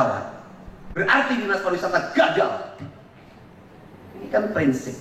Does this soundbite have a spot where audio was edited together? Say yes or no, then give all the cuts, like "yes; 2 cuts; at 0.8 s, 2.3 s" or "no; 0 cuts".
no; 0 cuts